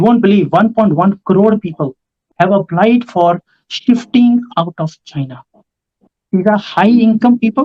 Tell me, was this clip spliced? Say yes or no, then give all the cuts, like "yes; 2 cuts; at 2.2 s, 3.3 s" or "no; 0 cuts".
yes; 2 cuts; at 2.2 s, 6.0 s